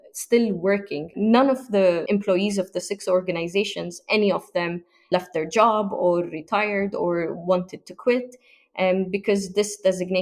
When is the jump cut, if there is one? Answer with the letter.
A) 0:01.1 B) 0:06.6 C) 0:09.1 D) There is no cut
A